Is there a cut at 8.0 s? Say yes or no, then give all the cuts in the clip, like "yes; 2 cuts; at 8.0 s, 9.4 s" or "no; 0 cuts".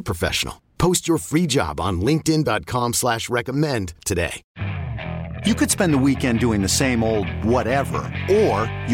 no; 1 cut; at 4.4 s